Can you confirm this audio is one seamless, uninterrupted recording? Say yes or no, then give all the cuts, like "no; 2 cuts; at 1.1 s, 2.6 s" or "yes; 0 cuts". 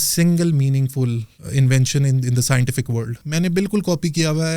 no; 2 cuts; at 1.3 s, 3.2 s